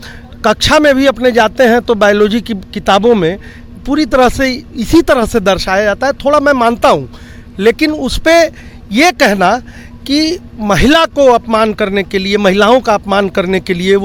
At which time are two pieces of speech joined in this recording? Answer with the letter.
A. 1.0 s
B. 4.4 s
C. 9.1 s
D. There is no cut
D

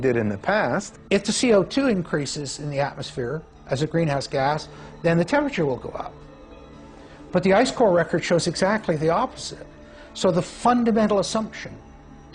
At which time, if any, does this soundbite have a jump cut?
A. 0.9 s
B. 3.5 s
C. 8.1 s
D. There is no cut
A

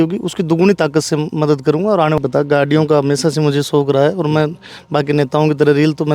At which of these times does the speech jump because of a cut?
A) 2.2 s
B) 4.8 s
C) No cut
A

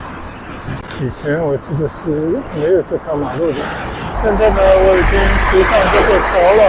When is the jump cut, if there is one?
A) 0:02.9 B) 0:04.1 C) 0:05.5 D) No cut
B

